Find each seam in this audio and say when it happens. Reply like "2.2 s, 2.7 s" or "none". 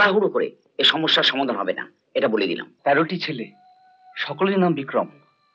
2.7 s